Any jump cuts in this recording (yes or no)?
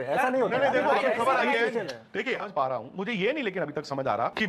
yes